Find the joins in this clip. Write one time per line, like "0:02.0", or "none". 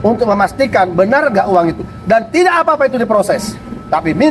none